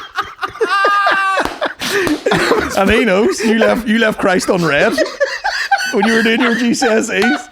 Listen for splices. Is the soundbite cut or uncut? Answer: uncut